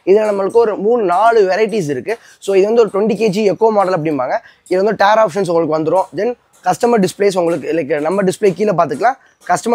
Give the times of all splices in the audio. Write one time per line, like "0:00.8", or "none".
none